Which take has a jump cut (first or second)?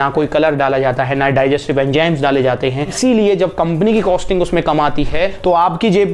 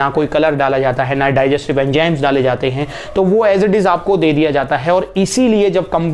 first